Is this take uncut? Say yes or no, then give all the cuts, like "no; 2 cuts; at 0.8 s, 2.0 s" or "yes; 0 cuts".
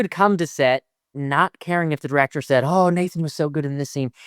no; 1 cut; at 1.1 s